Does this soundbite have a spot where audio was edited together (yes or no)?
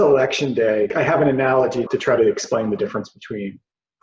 yes